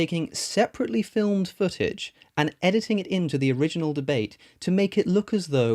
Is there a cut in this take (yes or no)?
no